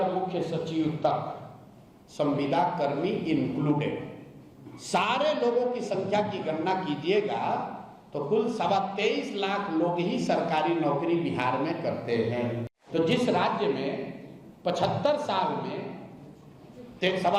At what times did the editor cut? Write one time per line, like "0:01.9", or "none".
0:12.7